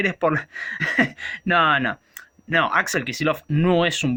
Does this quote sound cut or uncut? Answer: uncut